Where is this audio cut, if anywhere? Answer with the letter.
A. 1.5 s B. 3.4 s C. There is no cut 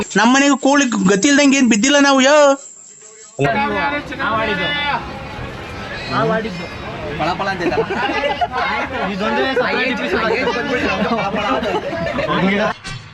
B